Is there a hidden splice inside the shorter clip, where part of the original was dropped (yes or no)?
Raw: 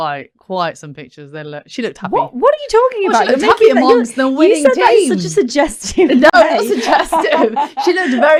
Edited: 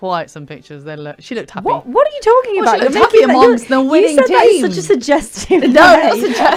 no